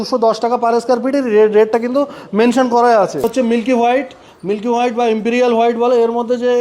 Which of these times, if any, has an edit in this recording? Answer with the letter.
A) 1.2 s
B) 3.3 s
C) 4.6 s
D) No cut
B